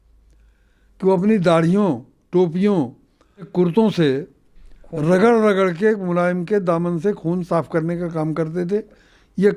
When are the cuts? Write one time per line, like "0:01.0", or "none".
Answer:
0:03.6